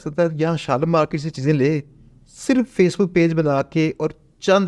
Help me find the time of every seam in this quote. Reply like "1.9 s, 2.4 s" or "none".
none